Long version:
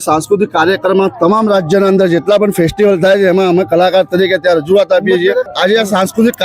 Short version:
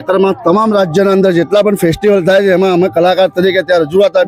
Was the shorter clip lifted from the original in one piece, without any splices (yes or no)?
yes